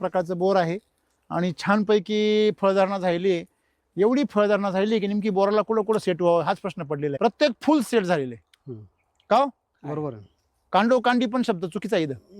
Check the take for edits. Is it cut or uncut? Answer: cut